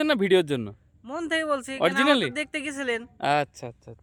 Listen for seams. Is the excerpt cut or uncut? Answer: uncut